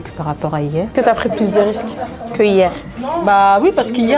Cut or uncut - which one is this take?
cut